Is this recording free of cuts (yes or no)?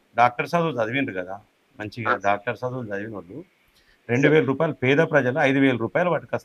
yes